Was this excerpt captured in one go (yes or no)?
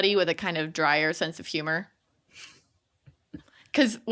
yes